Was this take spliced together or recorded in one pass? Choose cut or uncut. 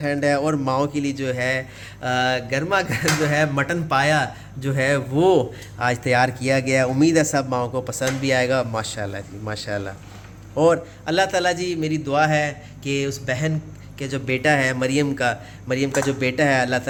uncut